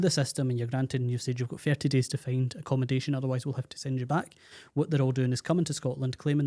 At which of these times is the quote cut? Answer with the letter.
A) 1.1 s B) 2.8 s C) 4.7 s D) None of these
D